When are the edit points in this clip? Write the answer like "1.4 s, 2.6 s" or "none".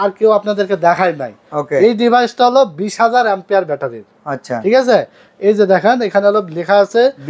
none